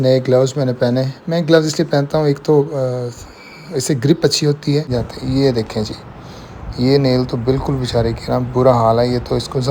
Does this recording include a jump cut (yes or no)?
yes